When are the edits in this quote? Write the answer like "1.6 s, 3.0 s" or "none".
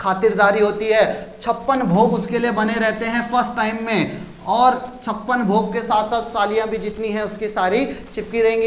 none

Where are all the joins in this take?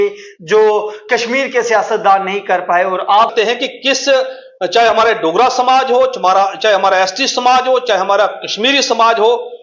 3.3 s

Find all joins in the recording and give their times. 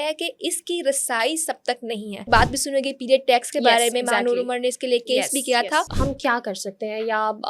2.3 s, 5.9 s

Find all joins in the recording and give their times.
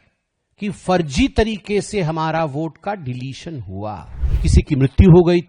4.2 s

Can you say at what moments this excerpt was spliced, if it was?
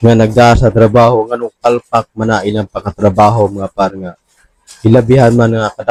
none

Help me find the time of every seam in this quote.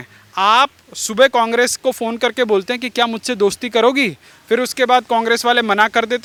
none

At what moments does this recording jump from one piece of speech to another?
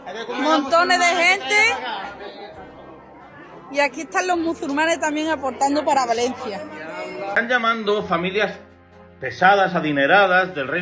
7.4 s

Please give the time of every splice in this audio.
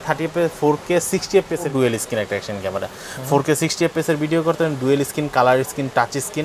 1.7 s

